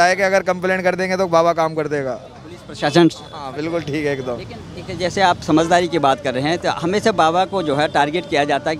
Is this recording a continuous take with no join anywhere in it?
yes; 0 cuts

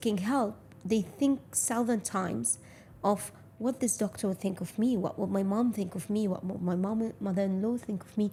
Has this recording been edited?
no; 0 cuts

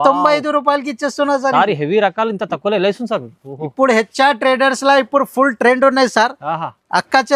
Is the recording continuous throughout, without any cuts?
yes; 0 cuts

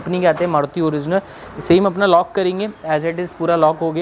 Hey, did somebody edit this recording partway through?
no; 0 cuts

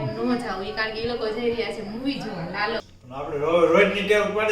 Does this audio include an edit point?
yes; 1 cut; at 2.9 s

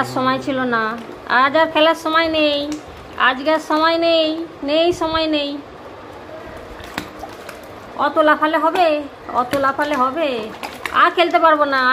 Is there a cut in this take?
no; 0 cuts

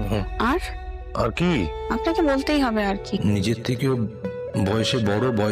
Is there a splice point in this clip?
yes; 1 cut; at 3.2 s

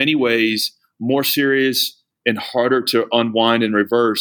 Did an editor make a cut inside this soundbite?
no; 0 cuts

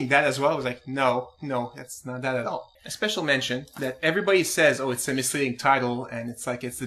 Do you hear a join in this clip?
yes; 1 cut; at 5.2 s

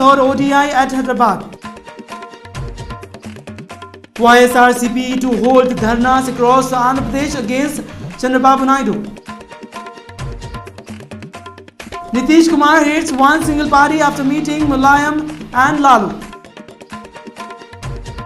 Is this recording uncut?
yes; 0 cuts

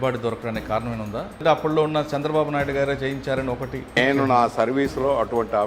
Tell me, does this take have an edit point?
yes; 2 cuts; at 1.4 s, 4.0 s

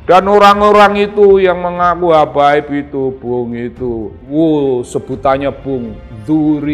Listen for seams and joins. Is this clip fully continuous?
no; 1 cut; at 4.2 s

